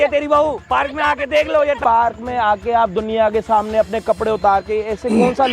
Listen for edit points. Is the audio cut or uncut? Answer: cut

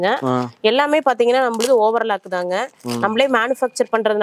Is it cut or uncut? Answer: uncut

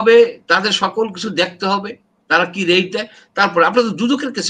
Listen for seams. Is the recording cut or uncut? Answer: uncut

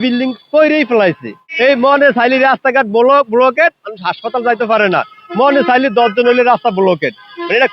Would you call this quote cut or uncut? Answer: cut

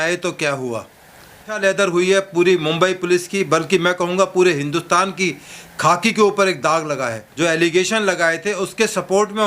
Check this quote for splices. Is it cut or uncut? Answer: cut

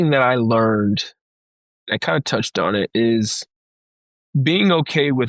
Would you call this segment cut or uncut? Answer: uncut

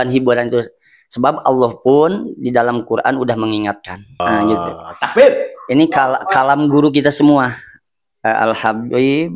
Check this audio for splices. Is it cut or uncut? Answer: cut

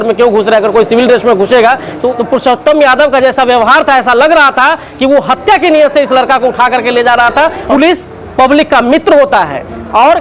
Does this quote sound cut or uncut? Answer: cut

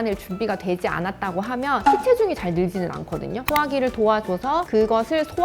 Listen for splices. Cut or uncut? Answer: cut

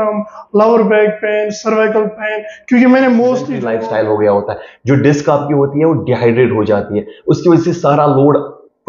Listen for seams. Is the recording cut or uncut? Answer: cut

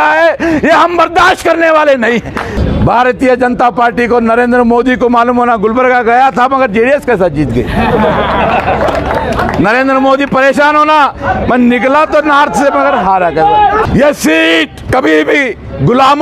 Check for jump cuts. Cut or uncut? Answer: cut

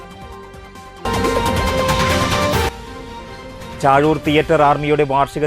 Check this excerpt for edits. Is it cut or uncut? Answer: cut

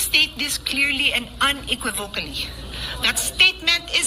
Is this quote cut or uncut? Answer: uncut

